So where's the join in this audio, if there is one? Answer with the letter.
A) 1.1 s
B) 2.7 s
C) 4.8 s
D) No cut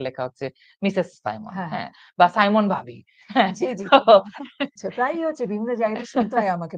C